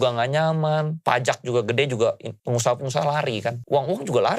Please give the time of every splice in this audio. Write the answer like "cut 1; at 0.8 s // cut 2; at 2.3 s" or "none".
cut 1; at 0.9 s // cut 2; at 2.3 s // cut 3; at 3.6 s